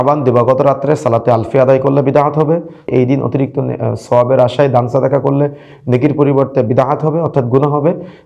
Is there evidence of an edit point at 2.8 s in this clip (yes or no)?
yes